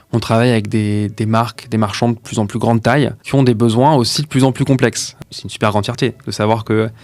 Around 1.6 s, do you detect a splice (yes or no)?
no